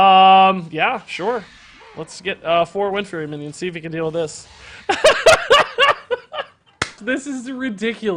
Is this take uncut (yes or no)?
no